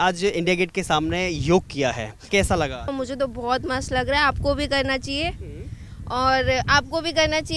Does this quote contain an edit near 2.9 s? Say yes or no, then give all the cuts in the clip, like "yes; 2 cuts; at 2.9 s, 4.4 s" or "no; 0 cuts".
yes; 2 cuts; at 2.1 s, 2.9 s